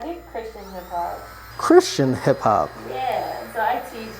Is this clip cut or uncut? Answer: cut